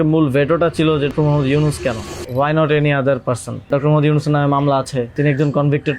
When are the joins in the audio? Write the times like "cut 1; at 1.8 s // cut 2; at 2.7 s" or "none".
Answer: cut 1; at 1.1 s // cut 2; at 2.1 s // cut 3; at 3.7 s // cut 4; at 5.1 s